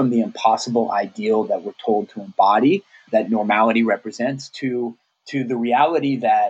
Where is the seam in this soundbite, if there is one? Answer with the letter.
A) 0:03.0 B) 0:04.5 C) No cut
A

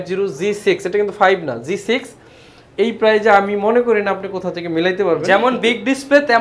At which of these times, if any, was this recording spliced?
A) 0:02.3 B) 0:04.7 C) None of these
C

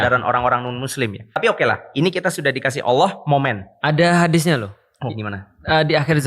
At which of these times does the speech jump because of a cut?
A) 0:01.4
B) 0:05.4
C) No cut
A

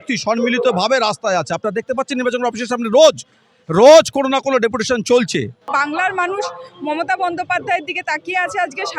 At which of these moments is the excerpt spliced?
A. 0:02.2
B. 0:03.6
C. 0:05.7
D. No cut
C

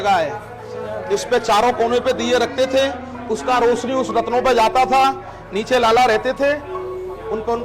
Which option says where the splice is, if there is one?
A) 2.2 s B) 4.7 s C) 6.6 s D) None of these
D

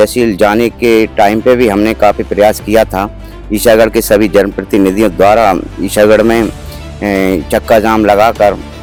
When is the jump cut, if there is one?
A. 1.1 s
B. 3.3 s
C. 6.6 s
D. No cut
D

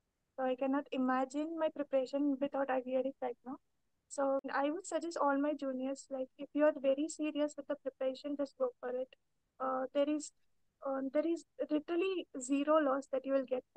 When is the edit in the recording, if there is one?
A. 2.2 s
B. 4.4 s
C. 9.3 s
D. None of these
B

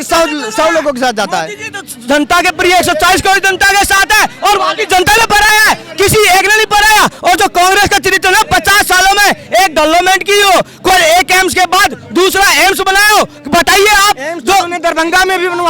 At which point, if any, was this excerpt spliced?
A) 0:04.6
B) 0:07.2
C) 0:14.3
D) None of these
D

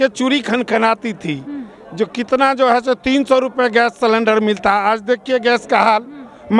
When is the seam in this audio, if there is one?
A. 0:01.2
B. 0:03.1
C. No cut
C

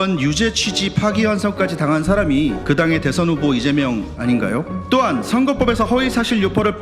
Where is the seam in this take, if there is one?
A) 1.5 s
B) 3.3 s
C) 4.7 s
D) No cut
C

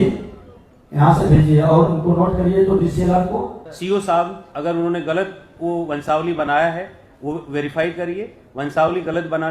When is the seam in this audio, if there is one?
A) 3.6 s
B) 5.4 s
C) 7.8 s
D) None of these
A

